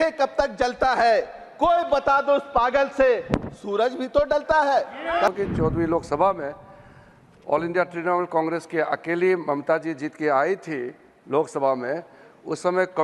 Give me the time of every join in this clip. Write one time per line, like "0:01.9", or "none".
0:05.3